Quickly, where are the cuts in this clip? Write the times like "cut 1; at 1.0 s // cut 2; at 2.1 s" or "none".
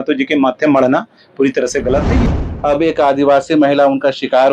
cut 1; at 2.2 s

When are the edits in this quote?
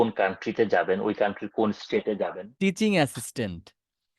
cut 1; at 2.4 s

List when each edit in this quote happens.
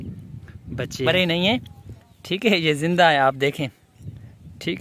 cut 1; at 1.1 s

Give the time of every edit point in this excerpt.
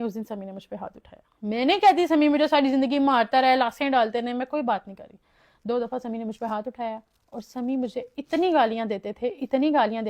none

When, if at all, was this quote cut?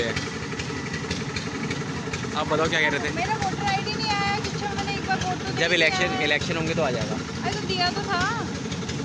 none

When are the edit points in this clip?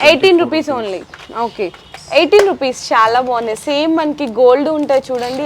cut 1; at 1.9 s

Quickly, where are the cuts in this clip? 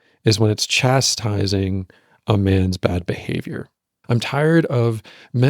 cut 1; at 3.9 s

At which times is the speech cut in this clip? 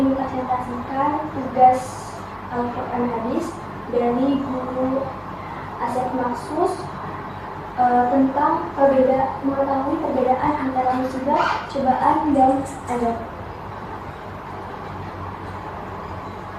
none

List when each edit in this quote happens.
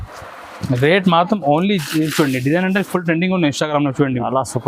cut 1; at 1.8 s

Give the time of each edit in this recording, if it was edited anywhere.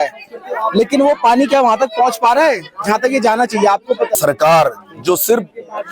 cut 1; at 4.1 s

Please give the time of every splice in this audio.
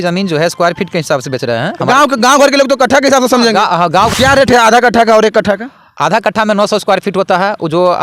cut 1; at 4.1 s

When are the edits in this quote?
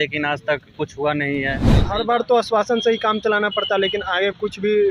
cut 1; at 1.8 s

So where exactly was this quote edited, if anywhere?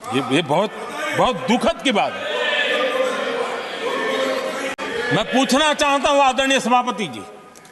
none

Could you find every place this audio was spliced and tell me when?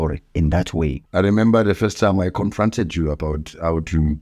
cut 1; at 1.0 s

